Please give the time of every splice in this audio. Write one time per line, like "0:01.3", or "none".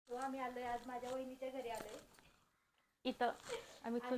none